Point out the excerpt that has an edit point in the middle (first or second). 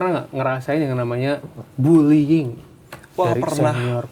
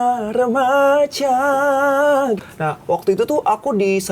second